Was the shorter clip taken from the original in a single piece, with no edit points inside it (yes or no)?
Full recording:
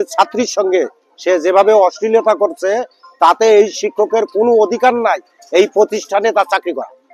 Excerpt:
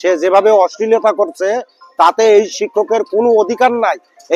yes